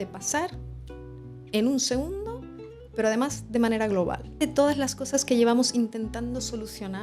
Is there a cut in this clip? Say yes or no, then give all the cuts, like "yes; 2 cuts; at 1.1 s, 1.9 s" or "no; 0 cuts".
yes; 1 cut; at 4.3 s